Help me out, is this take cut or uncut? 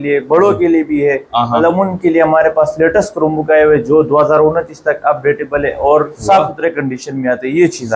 uncut